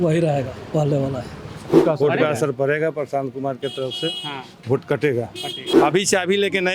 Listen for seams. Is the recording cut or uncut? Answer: cut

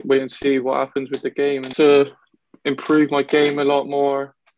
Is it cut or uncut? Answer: cut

